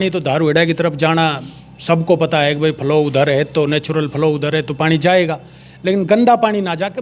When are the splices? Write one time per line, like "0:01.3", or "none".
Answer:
none

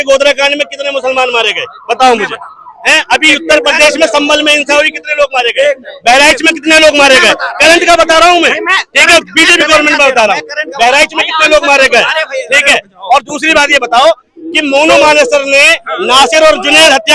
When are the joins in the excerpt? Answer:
none

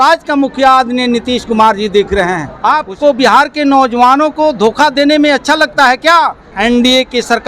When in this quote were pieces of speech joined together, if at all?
0:02.5
0:06.5

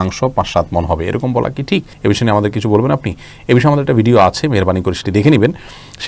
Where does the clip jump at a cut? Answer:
none

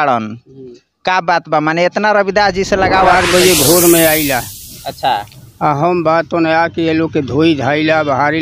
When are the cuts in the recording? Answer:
0:03.1

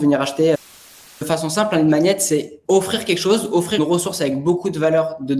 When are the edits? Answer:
0:01.2
0:02.5
0:03.8

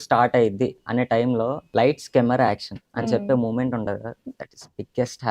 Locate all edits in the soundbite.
0:01.6

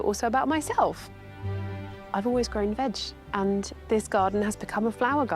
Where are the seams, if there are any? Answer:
0:03.8

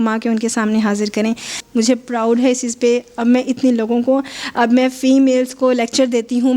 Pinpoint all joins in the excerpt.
0:01.6

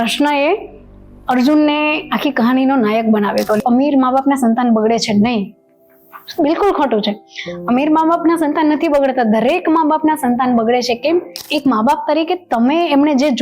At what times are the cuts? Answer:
0:03.6
0:11.4

